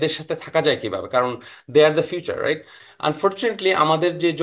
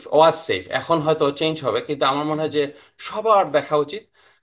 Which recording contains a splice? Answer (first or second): first